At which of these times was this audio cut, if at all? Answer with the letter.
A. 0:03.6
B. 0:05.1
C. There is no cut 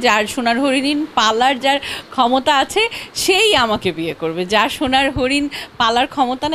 C